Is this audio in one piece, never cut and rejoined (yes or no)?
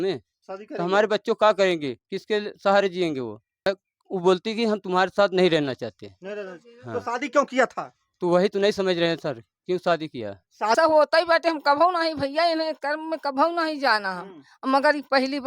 no